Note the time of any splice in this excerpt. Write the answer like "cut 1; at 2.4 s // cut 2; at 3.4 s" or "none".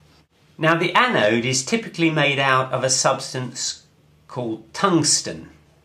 cut 1; at 2.2 s